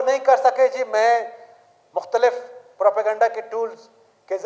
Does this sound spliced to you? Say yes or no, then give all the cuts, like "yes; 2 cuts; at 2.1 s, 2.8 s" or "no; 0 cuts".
no; 0 cuts